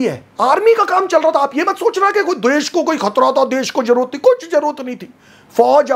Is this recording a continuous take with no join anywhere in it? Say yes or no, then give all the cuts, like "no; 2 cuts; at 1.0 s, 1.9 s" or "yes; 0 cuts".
yes; 0 cuts